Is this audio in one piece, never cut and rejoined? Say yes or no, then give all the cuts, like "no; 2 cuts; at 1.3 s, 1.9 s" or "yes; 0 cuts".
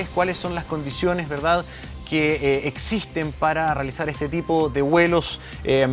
no; 1 cut; at 2.1 s